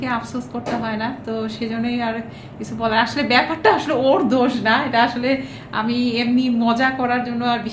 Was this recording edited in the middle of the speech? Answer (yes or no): no